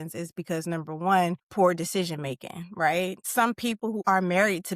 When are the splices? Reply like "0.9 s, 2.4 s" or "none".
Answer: 1.4 s, 3.7 s